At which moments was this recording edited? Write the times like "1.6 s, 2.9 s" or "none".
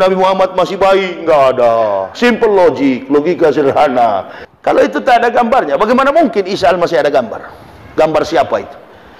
4.3 s